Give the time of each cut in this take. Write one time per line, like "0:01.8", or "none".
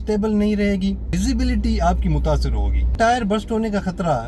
0:01.1
0:02.9